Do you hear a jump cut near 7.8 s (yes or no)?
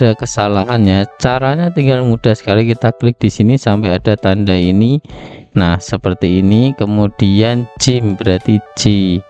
no